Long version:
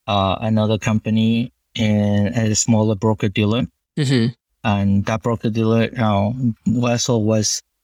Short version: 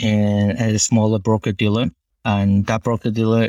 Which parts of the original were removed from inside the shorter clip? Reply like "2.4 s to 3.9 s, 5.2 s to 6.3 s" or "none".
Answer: 3.8 s to 4.5 s